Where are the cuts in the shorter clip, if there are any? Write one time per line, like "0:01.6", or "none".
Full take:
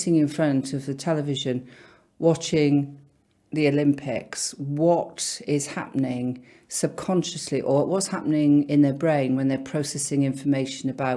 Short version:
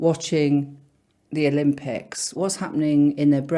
0:02.4